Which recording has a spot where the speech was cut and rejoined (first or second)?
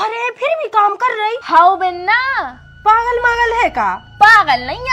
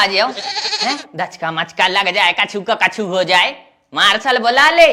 first